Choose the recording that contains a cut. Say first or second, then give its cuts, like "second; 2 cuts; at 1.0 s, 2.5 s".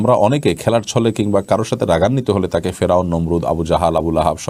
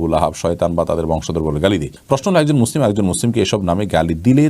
second; 1 cut; at 1.9 s